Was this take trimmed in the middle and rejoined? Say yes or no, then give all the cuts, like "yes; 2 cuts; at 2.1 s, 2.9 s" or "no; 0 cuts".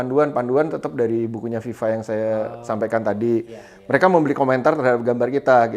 no; 0 cuts